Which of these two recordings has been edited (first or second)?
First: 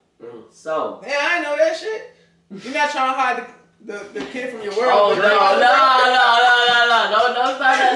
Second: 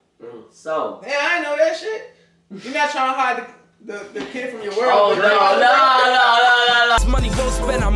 second